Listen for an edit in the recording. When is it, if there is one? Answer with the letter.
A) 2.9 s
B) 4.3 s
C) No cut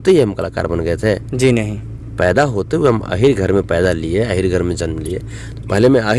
C